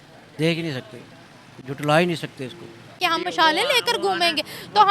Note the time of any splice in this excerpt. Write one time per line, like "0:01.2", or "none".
0:02.9